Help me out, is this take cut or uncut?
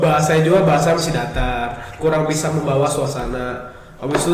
uncut